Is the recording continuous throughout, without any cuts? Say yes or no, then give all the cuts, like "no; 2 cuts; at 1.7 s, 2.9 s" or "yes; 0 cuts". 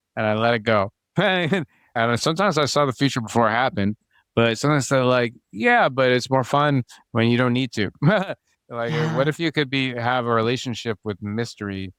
yes; 0 cuts